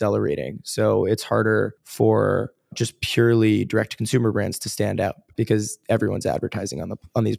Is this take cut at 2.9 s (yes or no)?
yes